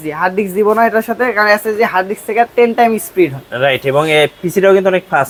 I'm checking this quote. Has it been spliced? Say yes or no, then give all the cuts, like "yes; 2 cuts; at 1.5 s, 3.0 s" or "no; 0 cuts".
no; 0 cuts